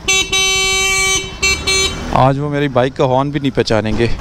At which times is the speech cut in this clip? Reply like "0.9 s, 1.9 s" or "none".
1.4 s